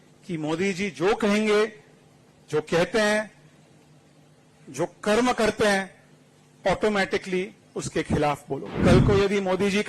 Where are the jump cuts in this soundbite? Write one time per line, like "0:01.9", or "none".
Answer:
0:08.7